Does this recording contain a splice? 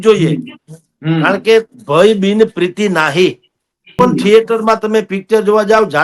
yes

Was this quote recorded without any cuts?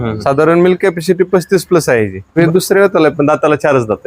no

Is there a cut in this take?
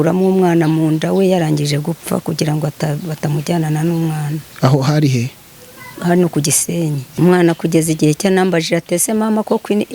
yes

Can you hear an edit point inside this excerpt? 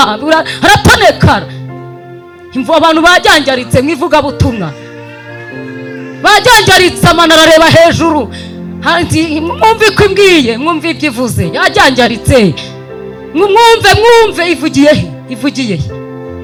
no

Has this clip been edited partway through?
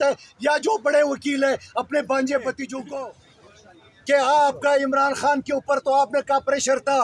yes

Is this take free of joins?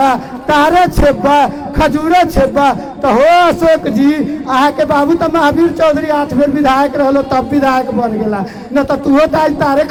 yes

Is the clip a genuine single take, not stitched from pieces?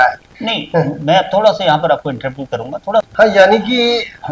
no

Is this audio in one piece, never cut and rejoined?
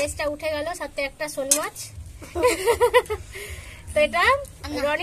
yes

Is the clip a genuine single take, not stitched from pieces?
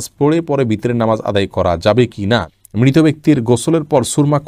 no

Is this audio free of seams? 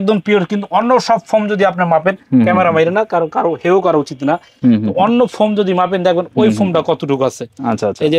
yes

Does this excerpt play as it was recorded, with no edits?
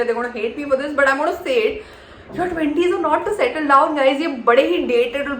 yes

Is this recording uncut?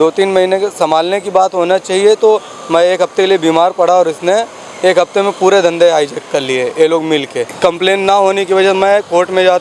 no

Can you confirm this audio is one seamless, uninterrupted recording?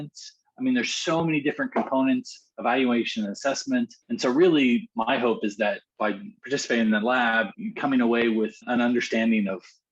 no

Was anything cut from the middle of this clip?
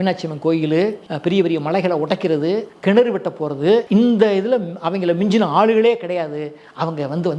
yes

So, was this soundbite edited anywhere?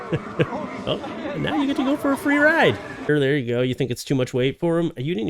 yes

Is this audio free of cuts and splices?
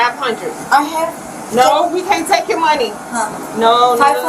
no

